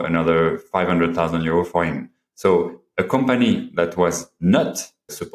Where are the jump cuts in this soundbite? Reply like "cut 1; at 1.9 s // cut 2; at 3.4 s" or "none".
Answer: none